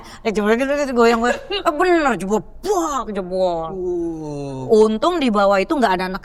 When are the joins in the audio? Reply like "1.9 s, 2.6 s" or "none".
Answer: none